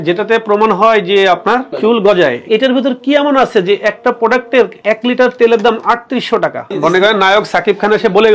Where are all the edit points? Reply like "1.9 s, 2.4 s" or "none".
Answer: 1.8 s, 2.4 s, 4.8 s, 6.6 s